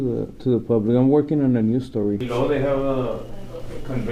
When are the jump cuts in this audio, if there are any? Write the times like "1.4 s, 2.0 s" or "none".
2.2 s